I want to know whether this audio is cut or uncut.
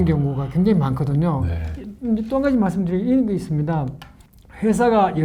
uncut